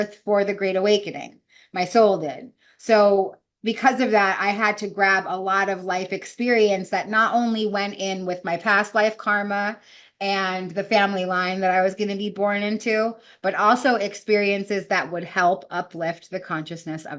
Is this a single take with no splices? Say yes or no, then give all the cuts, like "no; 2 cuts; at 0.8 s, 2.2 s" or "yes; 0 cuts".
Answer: yes; 0 cuts